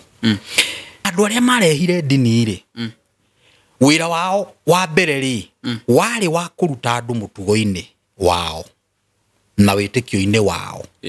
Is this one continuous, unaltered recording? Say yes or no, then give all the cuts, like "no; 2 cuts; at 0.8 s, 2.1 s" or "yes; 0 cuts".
no; 1 cut; at 1.1 s